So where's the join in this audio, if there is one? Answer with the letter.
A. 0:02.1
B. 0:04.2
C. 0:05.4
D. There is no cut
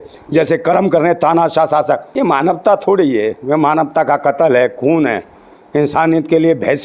A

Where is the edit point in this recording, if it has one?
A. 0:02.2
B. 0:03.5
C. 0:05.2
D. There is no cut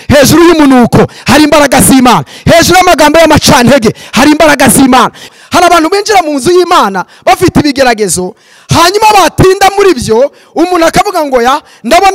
C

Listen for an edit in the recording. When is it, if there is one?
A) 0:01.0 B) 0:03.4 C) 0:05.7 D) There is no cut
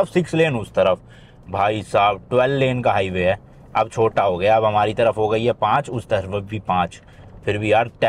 D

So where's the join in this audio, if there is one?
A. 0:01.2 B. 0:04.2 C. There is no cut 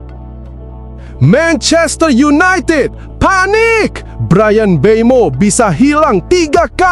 A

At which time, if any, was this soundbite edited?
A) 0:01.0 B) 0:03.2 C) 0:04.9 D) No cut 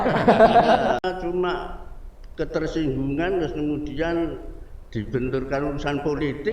A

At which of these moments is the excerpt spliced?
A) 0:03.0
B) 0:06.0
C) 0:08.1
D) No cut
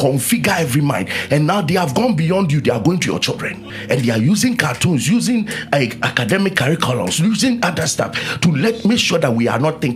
D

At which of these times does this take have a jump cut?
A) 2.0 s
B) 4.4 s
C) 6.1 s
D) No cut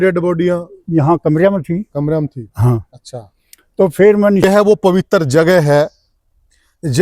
B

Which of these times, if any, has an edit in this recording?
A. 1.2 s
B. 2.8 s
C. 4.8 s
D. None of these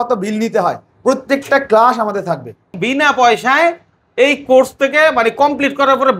B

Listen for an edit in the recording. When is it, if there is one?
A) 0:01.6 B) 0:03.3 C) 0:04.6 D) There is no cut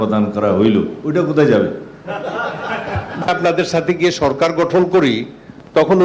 B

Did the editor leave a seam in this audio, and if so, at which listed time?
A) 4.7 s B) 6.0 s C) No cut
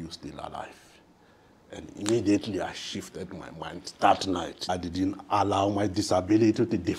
A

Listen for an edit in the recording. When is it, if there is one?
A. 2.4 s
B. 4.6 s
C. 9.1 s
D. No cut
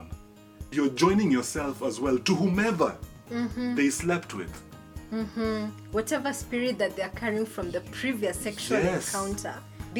D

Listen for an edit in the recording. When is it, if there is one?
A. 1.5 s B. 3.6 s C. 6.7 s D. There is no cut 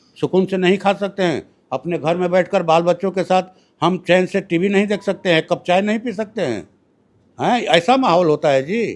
D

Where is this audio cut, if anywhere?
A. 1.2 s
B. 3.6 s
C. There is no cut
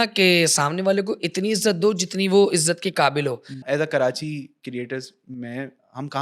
B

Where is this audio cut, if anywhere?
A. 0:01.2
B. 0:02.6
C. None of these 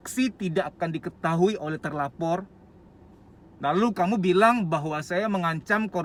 C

